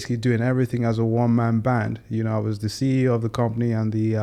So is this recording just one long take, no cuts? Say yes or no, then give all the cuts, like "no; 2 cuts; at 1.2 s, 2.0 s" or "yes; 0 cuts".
yes; 0 cuts